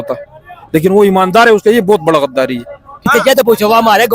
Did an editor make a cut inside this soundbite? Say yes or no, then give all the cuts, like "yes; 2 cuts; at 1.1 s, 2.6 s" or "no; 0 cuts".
yes; 1 cut; at 3.1 s